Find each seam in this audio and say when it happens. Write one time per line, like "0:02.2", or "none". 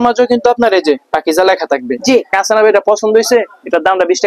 0:02.4